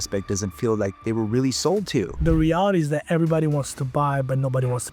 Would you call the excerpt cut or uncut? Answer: cut